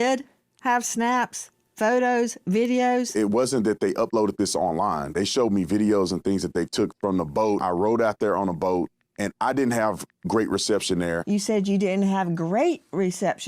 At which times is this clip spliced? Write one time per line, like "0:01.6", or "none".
0:03.1
0:07.6
0:11.2